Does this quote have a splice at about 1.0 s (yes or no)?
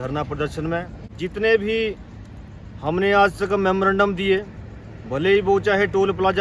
yes